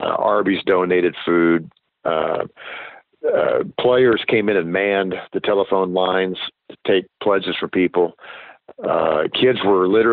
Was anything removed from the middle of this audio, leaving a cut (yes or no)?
no